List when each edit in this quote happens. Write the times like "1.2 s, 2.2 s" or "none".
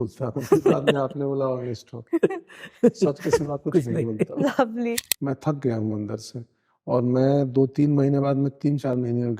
5.1 s